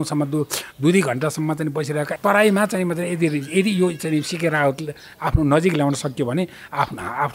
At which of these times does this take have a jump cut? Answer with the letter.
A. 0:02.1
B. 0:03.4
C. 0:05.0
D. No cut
A